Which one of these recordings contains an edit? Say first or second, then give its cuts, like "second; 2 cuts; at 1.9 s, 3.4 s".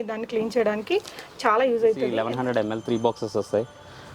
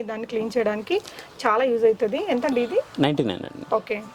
first; 1 cut; at 2.1 s